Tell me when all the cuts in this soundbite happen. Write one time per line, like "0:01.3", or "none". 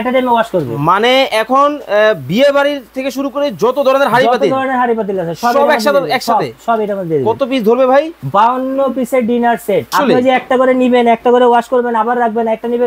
0:09.9